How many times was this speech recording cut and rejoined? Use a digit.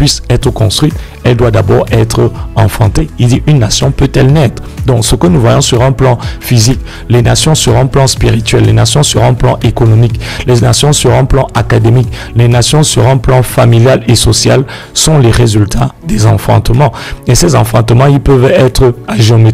0